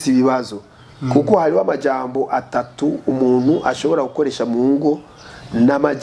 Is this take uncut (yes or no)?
yes